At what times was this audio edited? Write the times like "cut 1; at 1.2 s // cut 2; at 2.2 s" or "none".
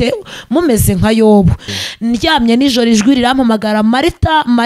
cut 1; at 1.7 s